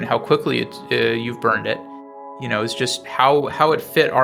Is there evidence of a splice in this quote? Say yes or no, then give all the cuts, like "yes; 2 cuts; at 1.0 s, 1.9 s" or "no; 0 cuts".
no; 0 cuts